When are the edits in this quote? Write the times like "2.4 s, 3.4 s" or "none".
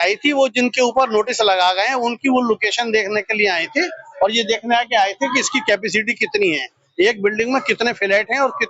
none